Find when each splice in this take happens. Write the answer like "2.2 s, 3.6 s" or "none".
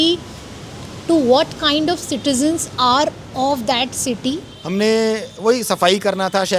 4.5 s

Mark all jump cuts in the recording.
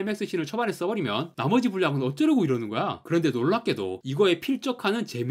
none

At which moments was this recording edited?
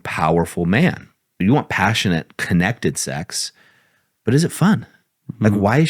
1.4 s

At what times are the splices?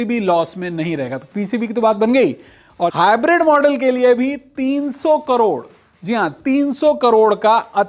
2.9 s

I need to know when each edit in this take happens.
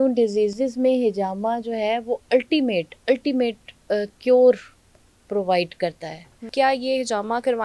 6.4 s

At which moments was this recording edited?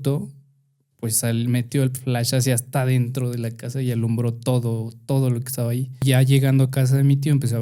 6.0 s

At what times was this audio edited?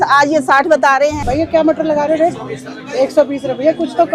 1.2 s

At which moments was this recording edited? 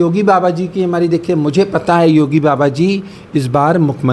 none

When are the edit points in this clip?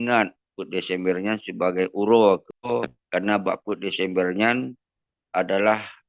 none

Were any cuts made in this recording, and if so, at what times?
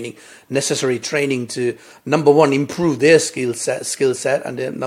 none

